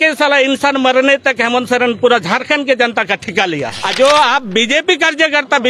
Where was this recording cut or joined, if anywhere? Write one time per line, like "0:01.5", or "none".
0:03.8

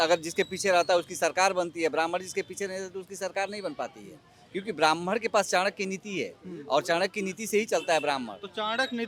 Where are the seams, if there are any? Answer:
none

